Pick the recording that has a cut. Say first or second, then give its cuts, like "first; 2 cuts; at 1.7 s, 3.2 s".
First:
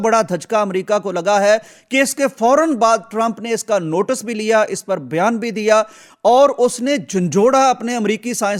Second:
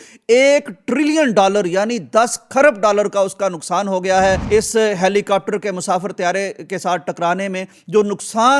second; 1 cut; at 4.4 s